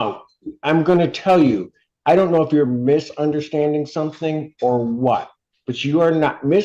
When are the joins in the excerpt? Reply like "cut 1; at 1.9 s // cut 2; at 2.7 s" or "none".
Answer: none